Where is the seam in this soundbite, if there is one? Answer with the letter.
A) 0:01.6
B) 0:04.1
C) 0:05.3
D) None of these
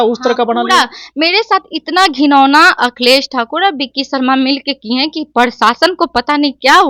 D